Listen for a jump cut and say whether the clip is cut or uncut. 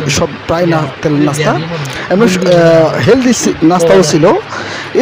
uncut